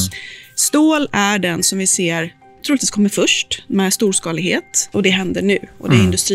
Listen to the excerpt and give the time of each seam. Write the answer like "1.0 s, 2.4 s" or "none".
4.9 s